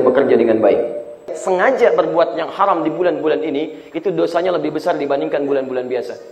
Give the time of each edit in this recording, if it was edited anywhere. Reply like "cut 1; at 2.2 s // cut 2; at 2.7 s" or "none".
cut 1; at 1.4 s